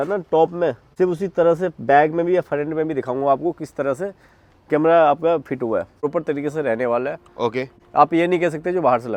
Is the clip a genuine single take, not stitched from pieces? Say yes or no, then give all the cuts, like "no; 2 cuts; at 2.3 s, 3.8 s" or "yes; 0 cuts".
yes; 0 cuts